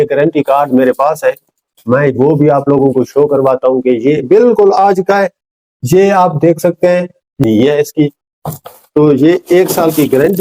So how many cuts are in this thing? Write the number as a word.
one